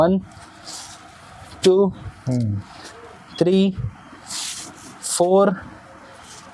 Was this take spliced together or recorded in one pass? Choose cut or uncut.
uncut